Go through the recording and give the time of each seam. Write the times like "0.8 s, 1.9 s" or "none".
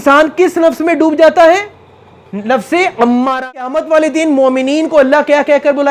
3.6 s